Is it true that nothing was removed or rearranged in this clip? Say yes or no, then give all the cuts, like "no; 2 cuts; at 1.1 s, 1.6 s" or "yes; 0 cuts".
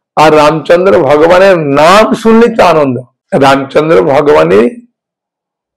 no; 1 cut; at 3.1 s